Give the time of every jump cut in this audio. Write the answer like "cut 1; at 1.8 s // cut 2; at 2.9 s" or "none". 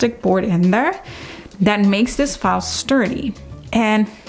none